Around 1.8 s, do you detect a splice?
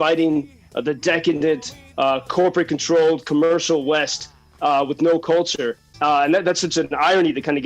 no; 1 cut; at 5.9 s

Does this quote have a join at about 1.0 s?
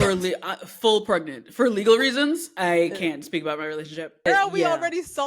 no; 1 cut; at 4.3 s

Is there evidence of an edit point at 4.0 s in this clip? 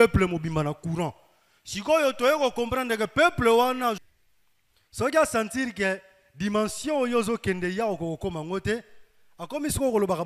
yes; 1 cut; at 4.0 s

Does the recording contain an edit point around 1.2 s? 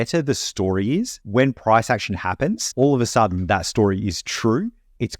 yes; 2 cuts; at 1.2 s, 2.6 s

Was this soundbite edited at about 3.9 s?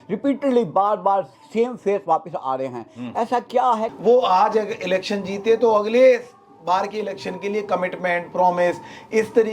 yes; 1 cut; at 3.9 s

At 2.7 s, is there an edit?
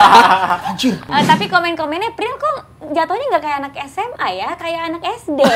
no; 1 cut; at 1.0 s

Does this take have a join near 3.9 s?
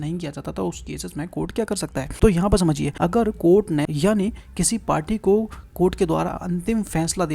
yes; 3 cuts; at 2.1 s, 2.9 s, 3.9 s

